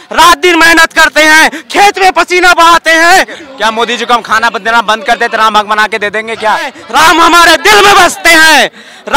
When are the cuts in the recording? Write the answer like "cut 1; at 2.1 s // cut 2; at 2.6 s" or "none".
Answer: cut 1; at 3.4 s // cut 2; at 6.8 s